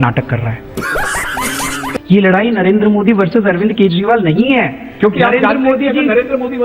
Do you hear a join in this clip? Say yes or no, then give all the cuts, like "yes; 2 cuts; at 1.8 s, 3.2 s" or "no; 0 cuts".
yes; 2 cuts; at 1.9 s, 4.9 s